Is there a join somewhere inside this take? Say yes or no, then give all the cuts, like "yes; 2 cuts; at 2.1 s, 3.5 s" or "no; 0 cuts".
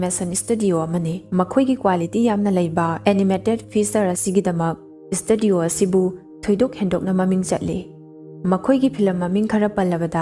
no; 0 cuts